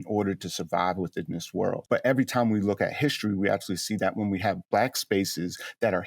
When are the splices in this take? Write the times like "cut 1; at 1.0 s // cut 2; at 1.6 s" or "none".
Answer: cut 1; at 1.8 s // cut 2; at 4.6 s